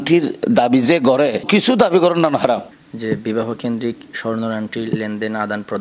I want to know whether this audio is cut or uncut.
uncut